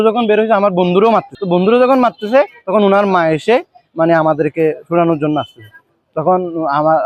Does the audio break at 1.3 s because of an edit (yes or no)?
yes